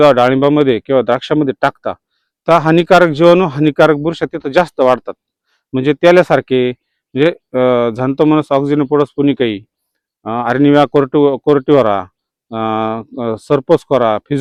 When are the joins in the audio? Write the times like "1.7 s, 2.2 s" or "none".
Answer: none